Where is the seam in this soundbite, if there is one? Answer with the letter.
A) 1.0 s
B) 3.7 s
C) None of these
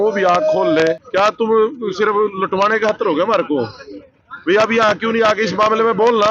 A